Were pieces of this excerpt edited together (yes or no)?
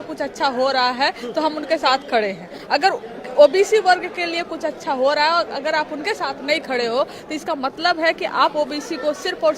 no